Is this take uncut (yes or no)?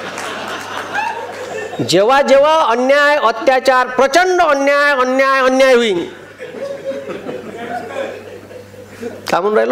yes